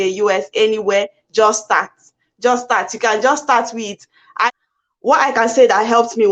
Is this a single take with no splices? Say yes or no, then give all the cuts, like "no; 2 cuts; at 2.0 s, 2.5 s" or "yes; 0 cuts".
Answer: no; 1 cut; at 4.5 s